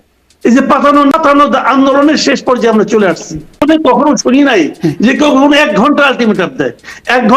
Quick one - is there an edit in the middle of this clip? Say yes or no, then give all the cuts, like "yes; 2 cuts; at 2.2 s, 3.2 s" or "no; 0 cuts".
yes; 2 cuts; at 1.1 s, 3.6 s